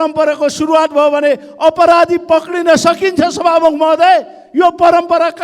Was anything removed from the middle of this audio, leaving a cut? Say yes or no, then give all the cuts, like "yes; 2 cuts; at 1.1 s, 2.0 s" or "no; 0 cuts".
no; 0 cuts